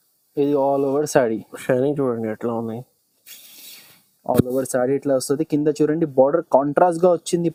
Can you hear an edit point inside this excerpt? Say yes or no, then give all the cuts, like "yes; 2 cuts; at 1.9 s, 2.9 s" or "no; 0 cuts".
no; 0 cuts